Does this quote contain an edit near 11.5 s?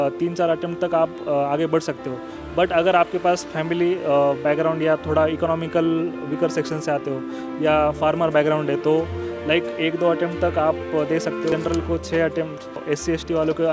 yes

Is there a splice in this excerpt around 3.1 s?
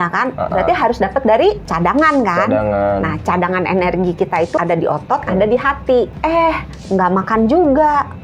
no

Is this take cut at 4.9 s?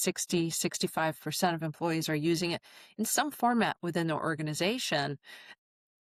no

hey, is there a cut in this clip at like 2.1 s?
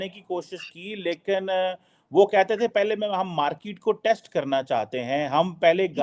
no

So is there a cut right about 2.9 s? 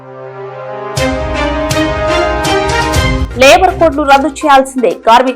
yes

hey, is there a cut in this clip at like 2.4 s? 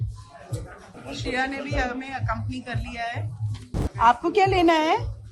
no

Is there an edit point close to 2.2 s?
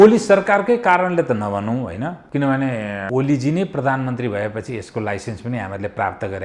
yes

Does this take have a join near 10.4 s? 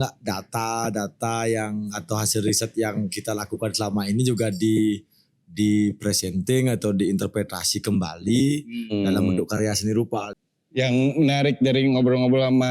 yes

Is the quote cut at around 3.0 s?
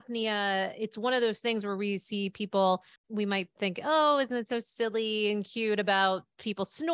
yes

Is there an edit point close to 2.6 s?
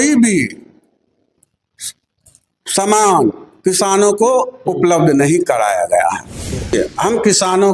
no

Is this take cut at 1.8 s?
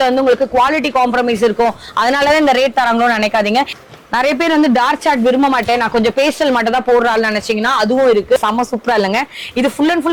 no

